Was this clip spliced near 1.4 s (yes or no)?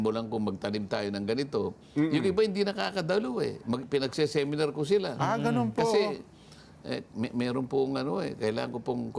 no